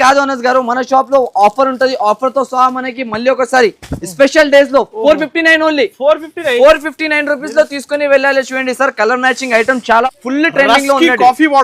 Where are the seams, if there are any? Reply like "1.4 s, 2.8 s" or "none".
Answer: 10.0 s